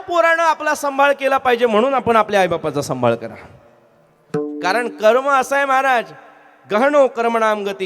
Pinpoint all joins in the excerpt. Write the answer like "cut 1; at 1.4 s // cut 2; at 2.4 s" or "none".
none